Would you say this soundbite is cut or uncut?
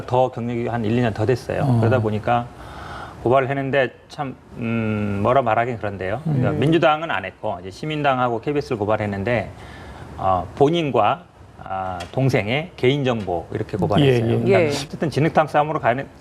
cut